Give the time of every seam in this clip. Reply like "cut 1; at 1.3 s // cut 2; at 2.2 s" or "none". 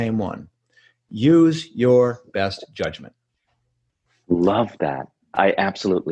none